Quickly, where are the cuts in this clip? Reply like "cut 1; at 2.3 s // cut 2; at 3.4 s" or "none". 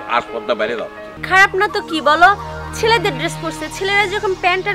cut 1; at 1.1 s